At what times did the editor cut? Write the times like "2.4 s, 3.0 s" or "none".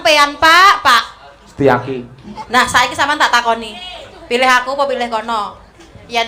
2.4 s